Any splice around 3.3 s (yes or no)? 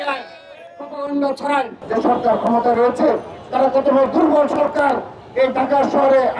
no